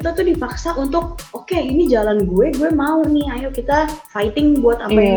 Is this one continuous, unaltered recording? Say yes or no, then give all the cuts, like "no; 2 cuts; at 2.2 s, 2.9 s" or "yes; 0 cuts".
yes; 0 cuts